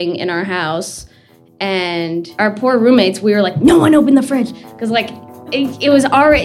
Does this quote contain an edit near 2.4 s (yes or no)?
yes